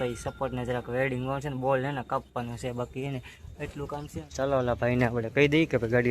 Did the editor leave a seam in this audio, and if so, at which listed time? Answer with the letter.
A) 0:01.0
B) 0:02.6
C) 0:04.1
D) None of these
C